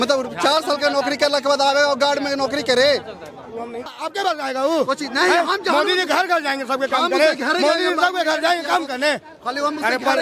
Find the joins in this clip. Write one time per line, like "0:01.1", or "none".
0:03.9